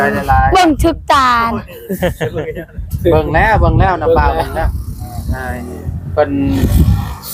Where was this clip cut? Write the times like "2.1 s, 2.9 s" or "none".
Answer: none